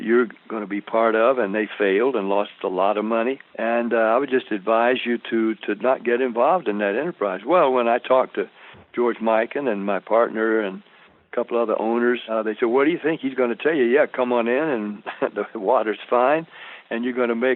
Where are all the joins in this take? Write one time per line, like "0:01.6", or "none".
0:03.5
0:12.2